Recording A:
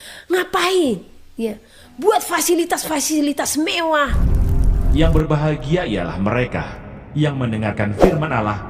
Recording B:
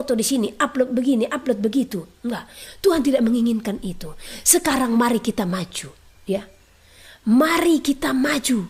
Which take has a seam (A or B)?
A